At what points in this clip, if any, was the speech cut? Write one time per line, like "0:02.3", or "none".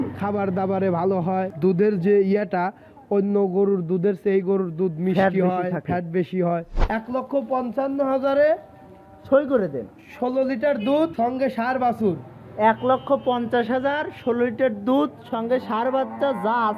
0:01.5
0:06.7
0:11.1